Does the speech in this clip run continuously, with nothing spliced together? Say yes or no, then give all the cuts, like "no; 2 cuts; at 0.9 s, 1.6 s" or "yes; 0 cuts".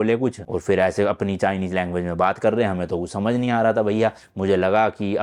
yes; 0 cuts